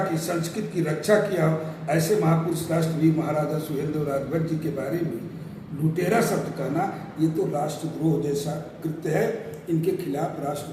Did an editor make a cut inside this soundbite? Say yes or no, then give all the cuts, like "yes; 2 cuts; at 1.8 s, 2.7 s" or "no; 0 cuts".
no; 0 cuts